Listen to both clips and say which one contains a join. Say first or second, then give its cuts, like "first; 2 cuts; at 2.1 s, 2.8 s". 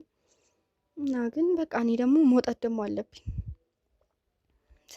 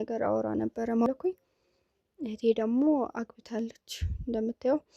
second; 1 cut; at 1.1 s